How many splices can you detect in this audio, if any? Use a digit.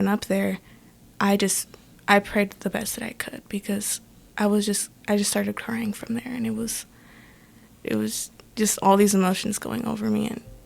1